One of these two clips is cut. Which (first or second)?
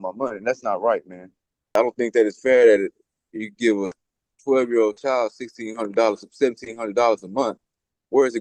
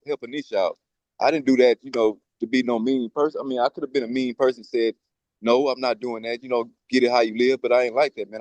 first